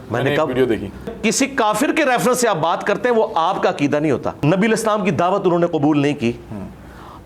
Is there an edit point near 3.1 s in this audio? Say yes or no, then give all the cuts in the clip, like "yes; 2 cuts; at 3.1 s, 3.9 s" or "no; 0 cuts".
no; 2 cuts; at 1.1 s, 4.3 s